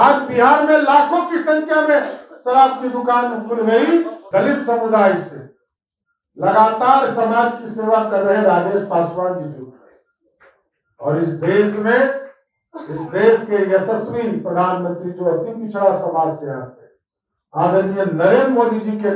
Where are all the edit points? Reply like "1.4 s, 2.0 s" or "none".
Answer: 4.2 s